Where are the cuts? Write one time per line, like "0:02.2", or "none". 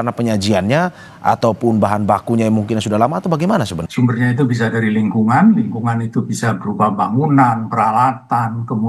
0:03.8